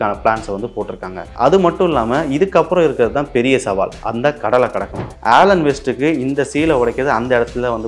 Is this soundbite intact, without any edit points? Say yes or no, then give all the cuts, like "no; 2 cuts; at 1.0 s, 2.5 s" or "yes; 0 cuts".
no; 2 cuts; at 1.2 s, 5.0 s